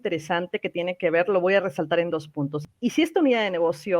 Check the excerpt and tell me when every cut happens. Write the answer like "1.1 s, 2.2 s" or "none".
2.5 s